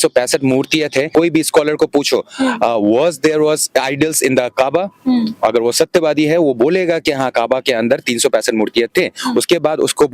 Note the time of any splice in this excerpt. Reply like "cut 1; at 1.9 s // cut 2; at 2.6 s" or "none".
cut 1; at 1.1 s